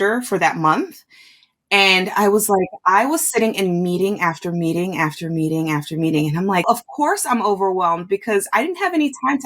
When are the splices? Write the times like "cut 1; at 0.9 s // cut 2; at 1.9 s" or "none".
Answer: cut 1; at 6.6 s